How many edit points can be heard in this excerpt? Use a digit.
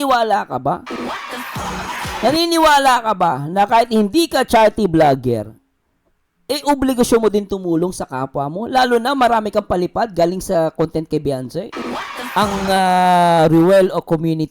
1